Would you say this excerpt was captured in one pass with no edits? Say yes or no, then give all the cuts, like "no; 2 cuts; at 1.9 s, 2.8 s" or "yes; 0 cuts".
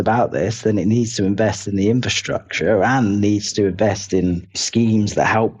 no; 1 cut; at 4.6 s